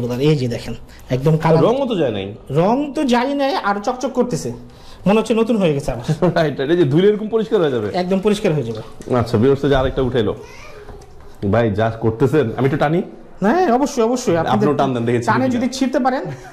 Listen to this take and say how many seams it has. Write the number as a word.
zero